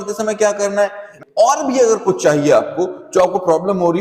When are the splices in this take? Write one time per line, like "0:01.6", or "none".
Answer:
0:01.1

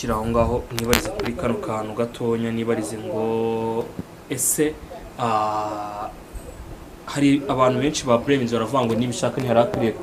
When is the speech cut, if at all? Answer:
none

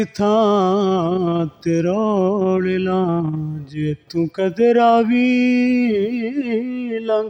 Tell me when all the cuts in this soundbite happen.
none

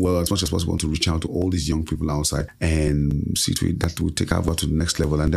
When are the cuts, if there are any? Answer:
0:02.5

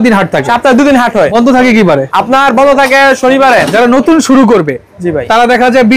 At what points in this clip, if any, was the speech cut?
0:01.3
0:02.1
0:03.7

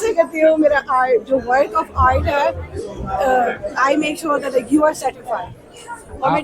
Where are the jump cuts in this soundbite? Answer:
none

